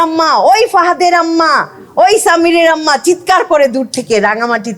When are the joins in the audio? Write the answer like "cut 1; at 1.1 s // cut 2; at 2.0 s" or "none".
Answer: none